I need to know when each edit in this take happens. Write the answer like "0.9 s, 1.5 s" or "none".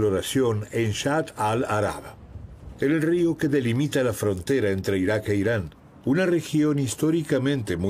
6.9 s